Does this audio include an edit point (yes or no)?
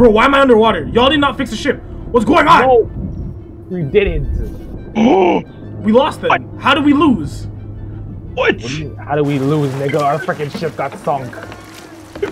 no